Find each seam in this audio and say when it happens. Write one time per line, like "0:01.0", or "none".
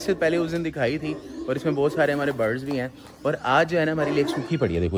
none

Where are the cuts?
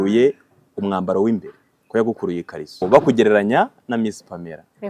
0:02.8

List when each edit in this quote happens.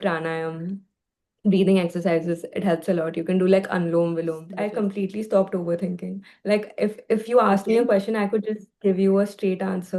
0:04.4

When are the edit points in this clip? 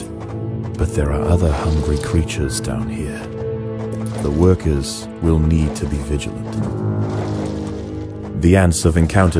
0:08.2

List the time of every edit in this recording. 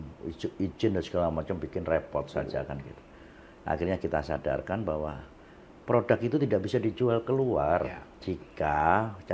none

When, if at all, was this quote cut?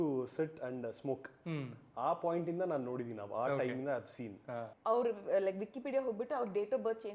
0:04.7

